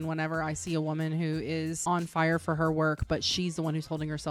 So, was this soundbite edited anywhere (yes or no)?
yes